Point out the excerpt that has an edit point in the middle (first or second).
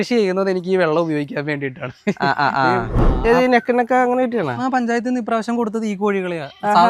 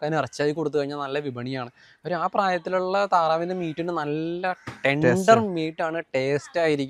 first